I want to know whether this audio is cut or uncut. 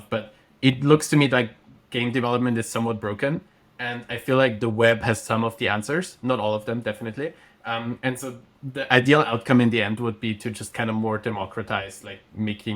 uncut